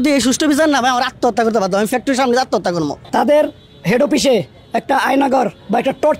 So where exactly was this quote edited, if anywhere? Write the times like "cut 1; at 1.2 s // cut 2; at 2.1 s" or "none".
cut 1; at 3.0 s